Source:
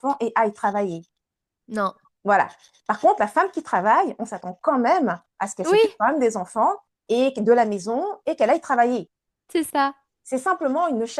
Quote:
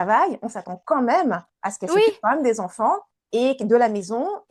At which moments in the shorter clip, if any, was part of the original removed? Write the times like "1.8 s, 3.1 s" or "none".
none